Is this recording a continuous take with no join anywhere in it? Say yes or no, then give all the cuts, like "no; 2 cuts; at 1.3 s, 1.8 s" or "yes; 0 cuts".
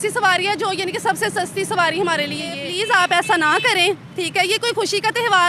no; 1 cut; at 2.7 s